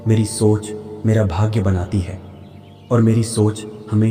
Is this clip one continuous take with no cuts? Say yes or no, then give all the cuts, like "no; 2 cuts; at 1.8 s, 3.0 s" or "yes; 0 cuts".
yes; 0 cuts